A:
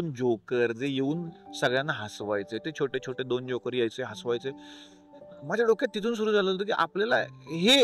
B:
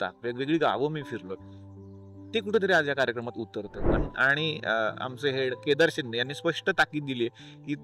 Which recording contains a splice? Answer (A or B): B